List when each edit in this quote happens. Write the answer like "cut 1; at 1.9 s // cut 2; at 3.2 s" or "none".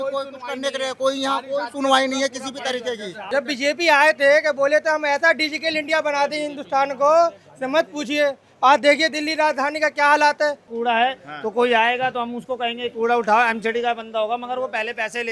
cut 1; at 3.2 s // cut 2; at 10.7 s